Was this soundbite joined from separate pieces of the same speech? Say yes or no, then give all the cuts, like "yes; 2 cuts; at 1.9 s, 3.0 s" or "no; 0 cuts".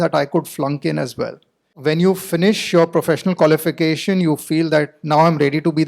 yes; 1 cut; at 1.7 s